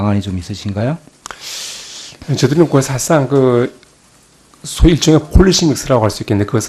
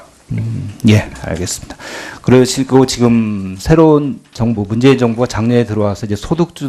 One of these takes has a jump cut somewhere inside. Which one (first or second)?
first